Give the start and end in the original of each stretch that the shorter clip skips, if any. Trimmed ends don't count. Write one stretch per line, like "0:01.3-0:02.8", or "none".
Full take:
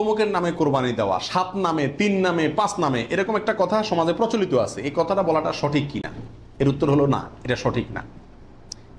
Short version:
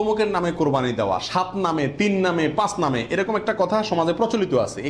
none

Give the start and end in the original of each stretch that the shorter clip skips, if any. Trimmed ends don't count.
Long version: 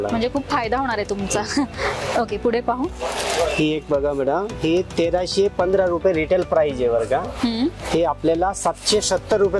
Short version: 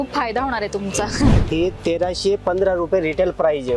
0:01.8-0:04.5

